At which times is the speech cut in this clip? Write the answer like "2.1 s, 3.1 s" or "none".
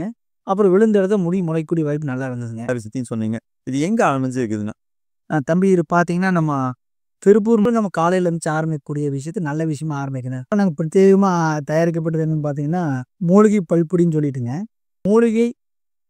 2.7 s, 7.7 s, 15.0 s

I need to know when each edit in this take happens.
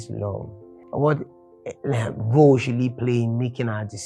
none

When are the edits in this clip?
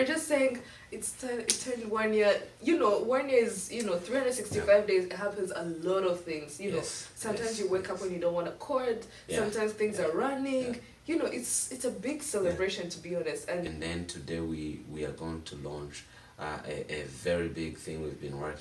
13.7 s

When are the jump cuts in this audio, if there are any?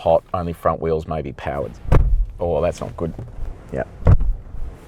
1.7 s, 3.3 s

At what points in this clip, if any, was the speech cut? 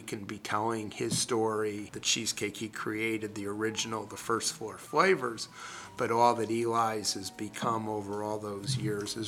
1.9 s

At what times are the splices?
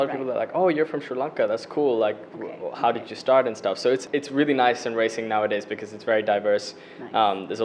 4.0 s

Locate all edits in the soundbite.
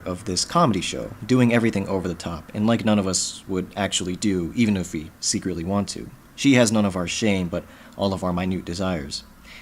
4.1 s

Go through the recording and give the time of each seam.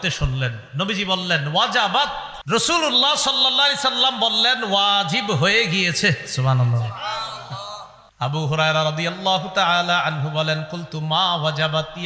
2.4 s, 8.0 s

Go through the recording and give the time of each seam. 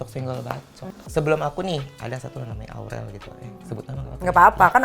1.0 s

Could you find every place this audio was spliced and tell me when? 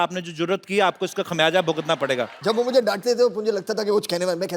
2.3 s

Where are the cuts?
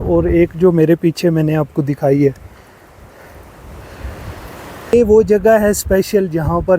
4.9 s

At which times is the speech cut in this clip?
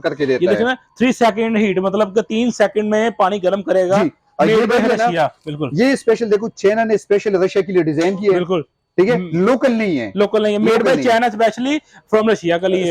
none

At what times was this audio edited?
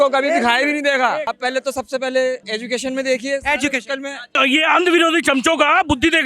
1.3 s, 2.5 s, 4.4 s

